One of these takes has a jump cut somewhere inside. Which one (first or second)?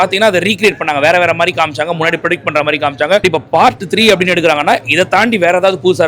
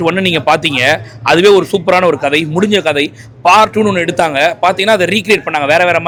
first